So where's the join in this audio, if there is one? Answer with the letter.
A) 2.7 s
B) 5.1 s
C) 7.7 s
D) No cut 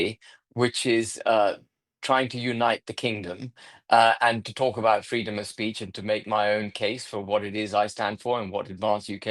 D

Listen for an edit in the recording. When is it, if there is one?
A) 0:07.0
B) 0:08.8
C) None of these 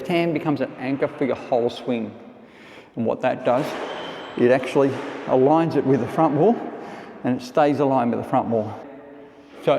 B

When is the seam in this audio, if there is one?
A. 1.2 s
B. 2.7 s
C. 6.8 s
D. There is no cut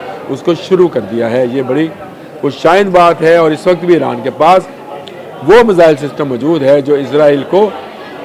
D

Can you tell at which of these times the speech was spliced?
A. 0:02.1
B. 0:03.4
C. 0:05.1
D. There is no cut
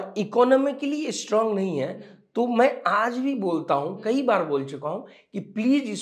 D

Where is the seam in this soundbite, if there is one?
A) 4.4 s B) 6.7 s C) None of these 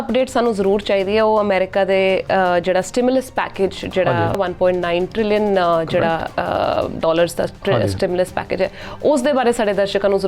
A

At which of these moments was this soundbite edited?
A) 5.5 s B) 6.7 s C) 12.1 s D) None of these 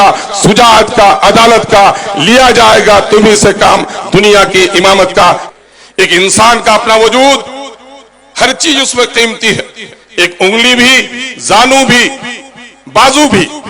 A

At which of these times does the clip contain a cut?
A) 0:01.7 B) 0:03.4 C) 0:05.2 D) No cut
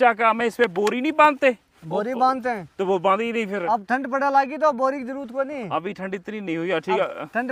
D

